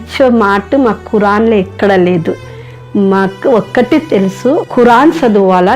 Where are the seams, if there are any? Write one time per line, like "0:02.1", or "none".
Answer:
0:04.7